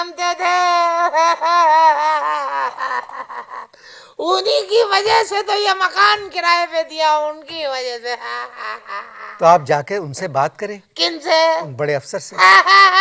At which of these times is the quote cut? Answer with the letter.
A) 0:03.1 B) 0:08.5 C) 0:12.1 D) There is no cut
D